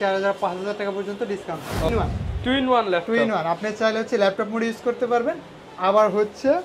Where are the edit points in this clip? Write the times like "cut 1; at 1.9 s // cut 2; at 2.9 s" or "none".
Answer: cut 1; at 1.9 s